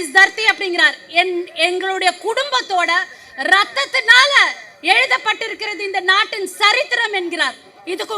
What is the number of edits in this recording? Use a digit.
0